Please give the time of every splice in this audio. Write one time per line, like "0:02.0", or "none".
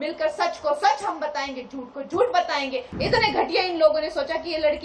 0:02.9